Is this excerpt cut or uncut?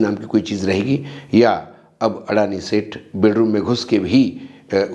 uncut